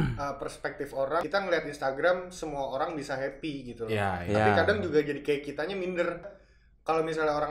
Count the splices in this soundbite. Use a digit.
2